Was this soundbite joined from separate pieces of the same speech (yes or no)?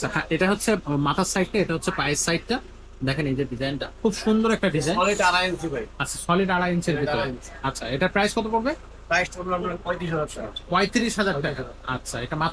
no